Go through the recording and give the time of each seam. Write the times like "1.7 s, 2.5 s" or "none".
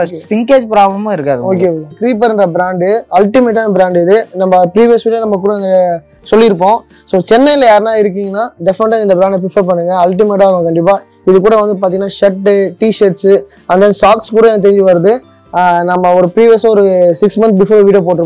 1.9 s